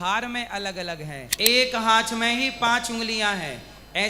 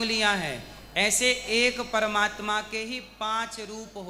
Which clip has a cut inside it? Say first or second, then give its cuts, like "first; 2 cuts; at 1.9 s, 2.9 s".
first; 1 cut; at 1.2 s